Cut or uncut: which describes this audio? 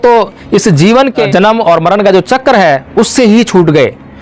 cut